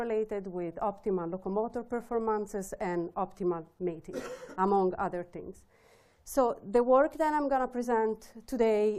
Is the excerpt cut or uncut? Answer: cut